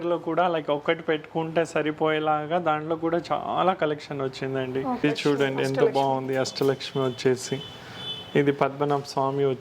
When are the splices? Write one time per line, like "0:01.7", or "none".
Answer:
0:05.0